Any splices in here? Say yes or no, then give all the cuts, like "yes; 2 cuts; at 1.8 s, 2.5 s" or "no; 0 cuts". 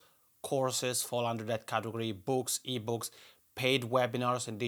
no; 0 cuts